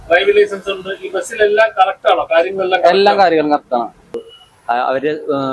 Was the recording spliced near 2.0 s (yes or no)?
no